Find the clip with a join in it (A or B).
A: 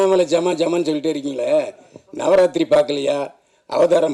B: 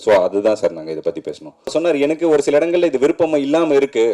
B